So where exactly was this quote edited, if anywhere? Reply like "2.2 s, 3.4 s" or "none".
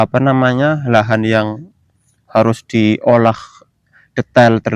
none